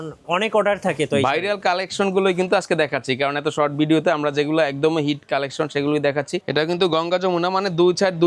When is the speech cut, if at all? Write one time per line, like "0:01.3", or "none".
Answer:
0:06.5